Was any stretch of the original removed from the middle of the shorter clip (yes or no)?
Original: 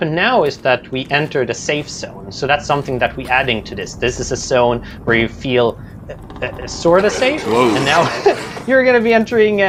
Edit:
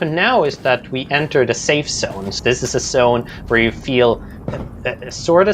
yes